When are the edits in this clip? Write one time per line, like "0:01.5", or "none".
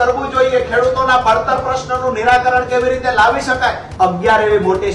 0:03.8